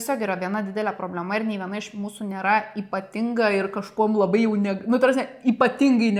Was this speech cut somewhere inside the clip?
no; 0 cuts

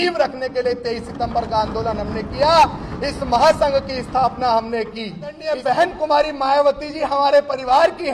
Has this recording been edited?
yes; 1 cut; at 5.5 s

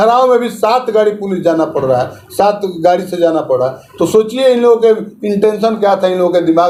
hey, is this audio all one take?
yes; 0 cuts

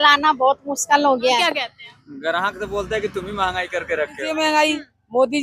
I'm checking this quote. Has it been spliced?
yes; 2 cuts; at 1.5 s, 4.3 s

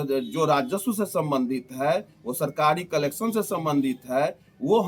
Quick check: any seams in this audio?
no; 0 cuts

